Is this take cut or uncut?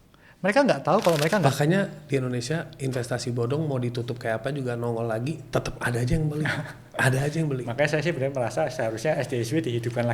cut